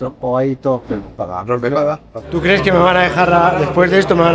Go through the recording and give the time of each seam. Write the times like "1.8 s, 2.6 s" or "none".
1.2 s, 2.2 s